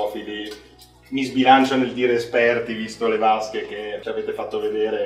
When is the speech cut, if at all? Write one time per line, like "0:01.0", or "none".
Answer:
0:04.0